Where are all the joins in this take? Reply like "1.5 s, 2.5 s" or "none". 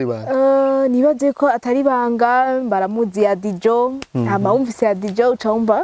none